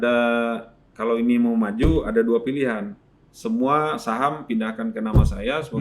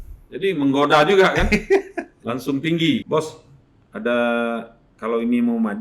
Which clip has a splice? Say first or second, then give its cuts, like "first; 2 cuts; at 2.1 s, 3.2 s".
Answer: second; 1 cut; at 3.0 s